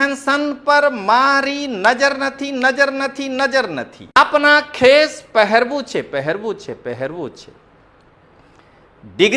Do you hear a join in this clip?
yes; 1 cut; at 4.2 s

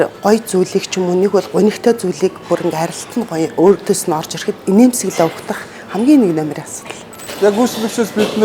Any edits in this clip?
yes; 1 cut; at 7.2 s

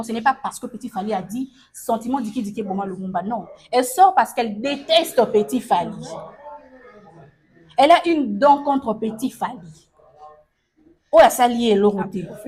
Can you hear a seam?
no; 0 cuts

